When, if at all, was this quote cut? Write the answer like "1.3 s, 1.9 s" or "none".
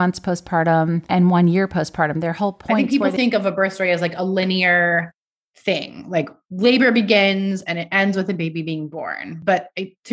1.0 s, 2.8 s